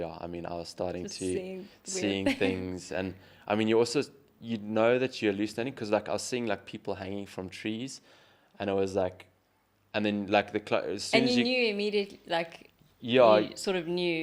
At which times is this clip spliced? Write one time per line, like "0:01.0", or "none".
none